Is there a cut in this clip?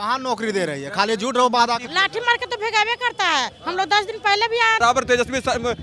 yes; 2 cuts; at 1.9 s, 4.8 s

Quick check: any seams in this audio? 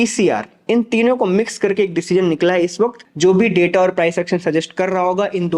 yes; 1 cut; at 3.1 s

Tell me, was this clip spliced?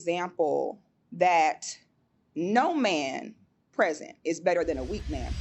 no; 0 cuts

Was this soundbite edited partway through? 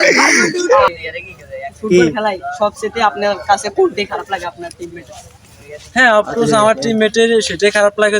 yes; 1 cut; at 0.9 s

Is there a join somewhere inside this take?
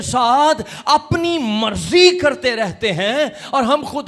no; 0 cuts

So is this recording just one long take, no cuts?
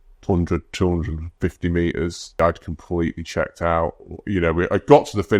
no; 1 cut; at 2.4 s

